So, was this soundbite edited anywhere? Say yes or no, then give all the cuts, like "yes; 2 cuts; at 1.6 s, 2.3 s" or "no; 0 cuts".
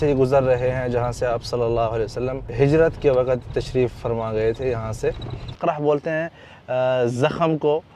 yes; 3 cuts; at 2.4 s, 4.0 s, 5.6 s